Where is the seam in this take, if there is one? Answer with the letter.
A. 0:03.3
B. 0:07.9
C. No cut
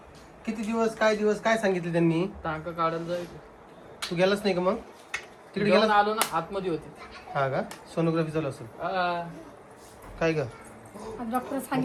C